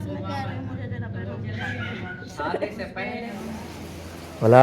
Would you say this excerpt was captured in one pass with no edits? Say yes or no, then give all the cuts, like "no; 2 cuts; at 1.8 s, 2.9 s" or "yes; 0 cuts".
no; 1 cut; at 3.3 s